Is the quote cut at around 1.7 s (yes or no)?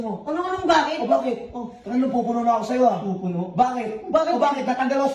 no